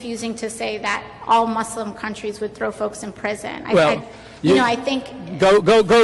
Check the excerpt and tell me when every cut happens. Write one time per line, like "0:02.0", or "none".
0:03.7